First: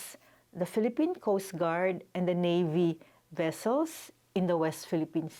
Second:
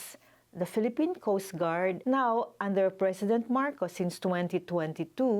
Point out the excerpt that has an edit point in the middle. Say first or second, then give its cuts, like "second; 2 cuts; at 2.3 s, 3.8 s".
second; 1 cut; at 2.0 s